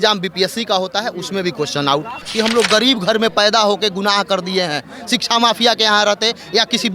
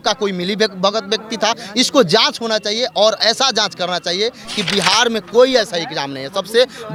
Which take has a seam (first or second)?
first